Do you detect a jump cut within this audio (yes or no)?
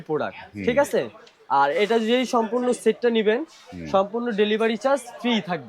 no